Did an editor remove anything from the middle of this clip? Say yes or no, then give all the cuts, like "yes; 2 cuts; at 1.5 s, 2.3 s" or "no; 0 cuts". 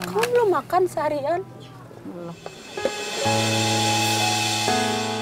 no; 0 cuts